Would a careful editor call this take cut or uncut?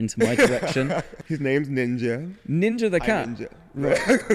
cut